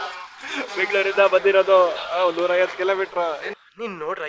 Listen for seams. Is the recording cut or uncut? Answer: uncut